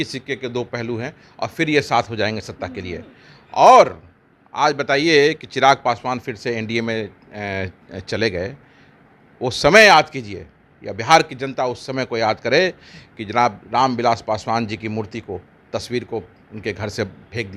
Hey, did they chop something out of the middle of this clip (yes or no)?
no